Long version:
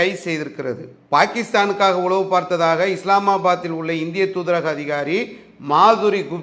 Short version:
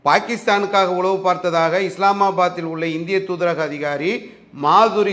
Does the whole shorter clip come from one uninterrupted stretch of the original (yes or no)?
yes